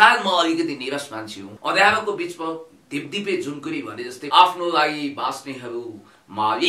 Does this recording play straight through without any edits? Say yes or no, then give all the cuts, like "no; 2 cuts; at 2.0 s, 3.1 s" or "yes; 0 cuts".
no; 2 cuts; at 1.5 s, 4.2 s